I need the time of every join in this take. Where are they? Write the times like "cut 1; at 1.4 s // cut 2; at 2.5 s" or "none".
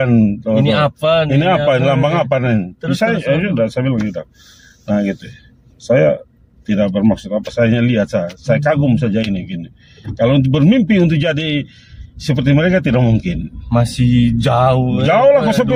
none